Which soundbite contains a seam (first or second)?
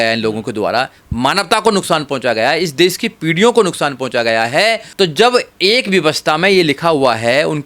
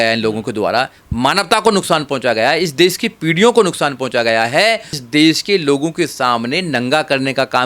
first